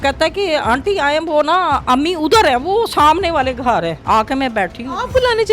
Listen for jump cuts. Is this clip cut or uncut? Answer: cut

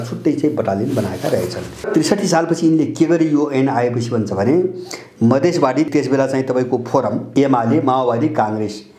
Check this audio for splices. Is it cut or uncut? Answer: cut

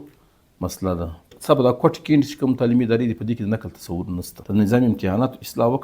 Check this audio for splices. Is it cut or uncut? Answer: cut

